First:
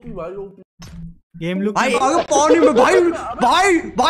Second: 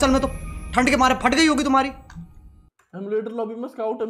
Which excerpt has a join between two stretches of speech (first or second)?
first